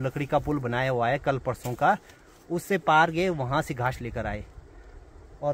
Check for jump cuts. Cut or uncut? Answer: uncut